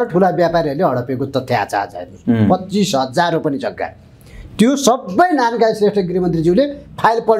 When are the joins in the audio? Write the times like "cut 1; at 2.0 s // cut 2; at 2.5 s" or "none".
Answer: none